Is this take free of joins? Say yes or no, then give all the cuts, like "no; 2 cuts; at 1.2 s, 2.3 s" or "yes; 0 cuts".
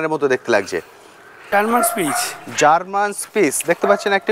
no; 1 cut; at 1.5 s